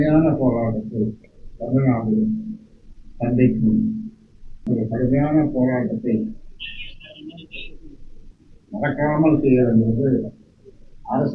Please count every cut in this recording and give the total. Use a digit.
1